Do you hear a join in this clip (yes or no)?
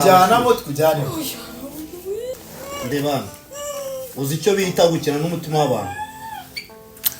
yes